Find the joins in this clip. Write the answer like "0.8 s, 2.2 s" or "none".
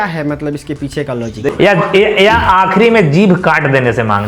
1.5 s